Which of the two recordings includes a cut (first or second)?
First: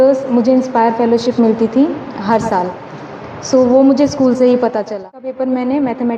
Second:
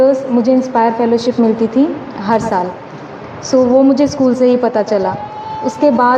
first